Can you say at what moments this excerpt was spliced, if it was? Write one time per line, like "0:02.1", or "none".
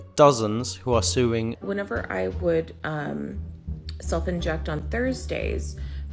0:01.6